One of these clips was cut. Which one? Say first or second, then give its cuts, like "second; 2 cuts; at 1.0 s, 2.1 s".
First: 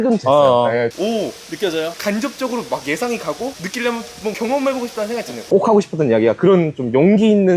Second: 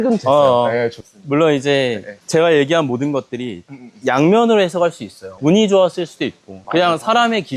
first; 2 cuts; at 0.9 s, 5.4 s